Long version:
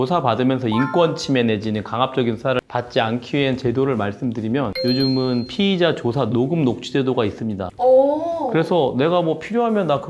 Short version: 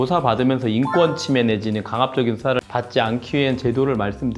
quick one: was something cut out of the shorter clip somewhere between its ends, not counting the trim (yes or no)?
no